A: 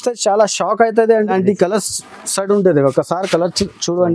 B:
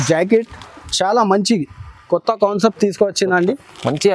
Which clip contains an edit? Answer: A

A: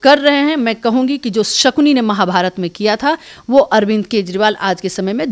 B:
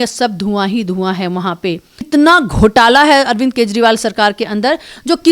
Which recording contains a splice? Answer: B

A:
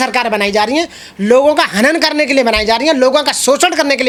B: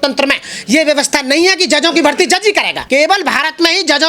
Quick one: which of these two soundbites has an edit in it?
B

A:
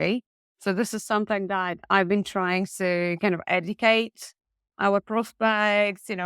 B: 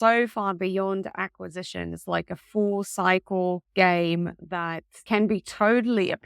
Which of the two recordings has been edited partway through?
B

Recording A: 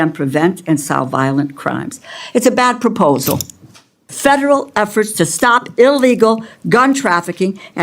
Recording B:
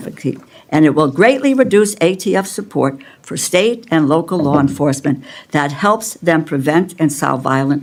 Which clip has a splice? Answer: A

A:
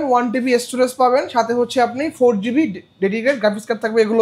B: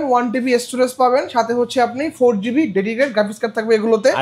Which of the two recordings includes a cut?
B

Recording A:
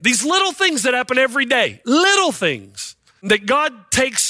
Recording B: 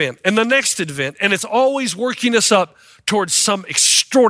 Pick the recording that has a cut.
A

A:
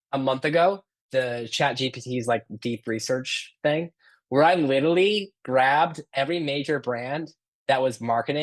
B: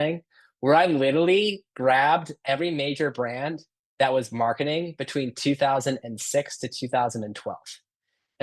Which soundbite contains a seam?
A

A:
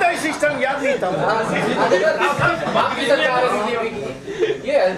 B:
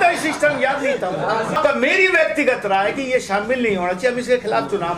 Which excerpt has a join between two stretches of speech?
B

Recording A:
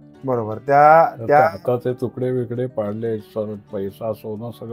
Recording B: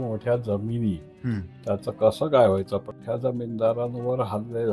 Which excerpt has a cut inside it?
B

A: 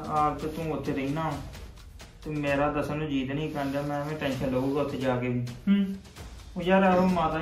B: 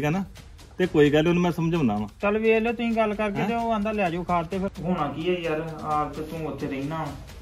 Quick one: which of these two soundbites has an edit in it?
B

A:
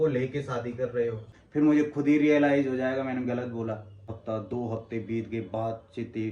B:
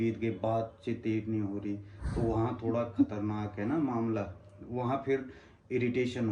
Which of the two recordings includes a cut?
A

